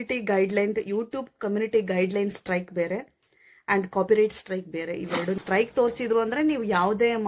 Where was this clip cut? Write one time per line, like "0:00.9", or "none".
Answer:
0:05.4